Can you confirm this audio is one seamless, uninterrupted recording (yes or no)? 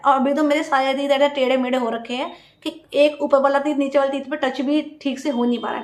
yes